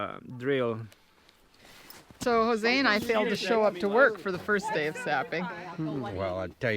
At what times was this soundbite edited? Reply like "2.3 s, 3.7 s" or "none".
2.2 s